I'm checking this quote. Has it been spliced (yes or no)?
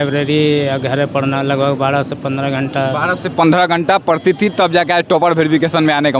no